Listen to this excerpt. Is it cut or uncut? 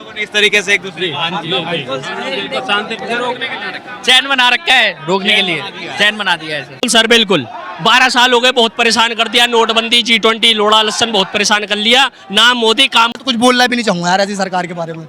cut